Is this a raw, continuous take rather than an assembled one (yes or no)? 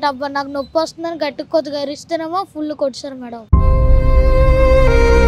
yes